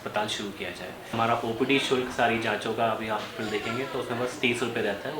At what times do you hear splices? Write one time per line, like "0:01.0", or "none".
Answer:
0:01.1